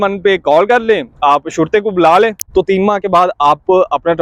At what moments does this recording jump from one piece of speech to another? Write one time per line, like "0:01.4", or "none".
0:02.4